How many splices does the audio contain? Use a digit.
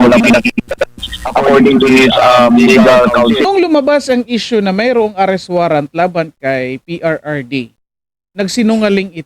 1